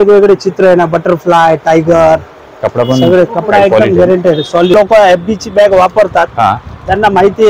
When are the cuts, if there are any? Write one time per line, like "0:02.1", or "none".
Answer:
0:04.7

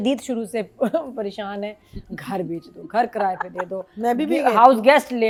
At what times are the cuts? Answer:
none

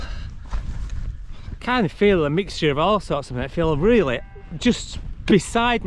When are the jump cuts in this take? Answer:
0:01.3

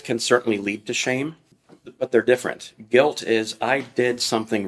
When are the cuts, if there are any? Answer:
none

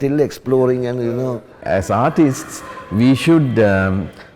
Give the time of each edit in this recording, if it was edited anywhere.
0:01.6

